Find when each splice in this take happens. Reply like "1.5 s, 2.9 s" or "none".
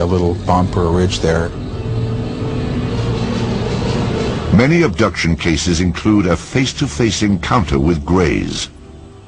none